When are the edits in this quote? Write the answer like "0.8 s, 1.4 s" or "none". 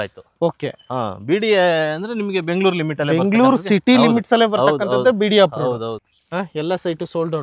5.9 s